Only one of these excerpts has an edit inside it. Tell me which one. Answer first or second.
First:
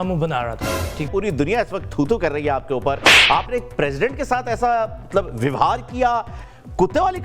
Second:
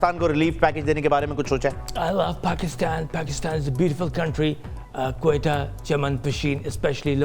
first